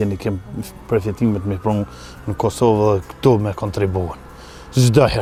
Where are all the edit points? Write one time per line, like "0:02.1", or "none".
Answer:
none